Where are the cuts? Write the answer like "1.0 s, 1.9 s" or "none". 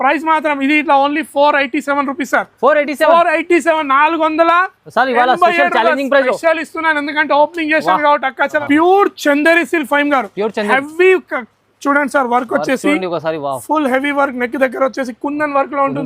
8.6 s